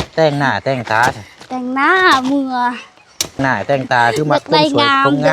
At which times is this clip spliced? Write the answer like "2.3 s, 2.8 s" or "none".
3.4 s